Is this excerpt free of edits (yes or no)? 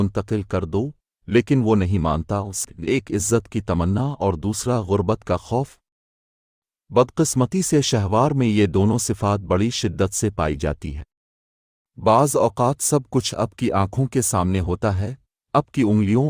no